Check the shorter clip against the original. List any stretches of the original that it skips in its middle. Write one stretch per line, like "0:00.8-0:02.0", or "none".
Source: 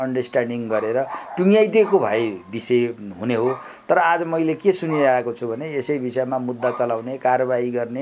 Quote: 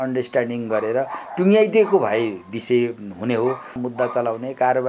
0:03.8-0:06.4